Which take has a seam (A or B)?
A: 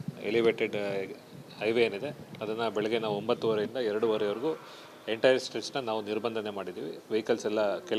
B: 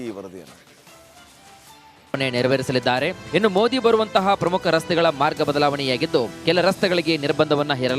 B